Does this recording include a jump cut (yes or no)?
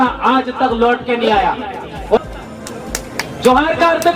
yes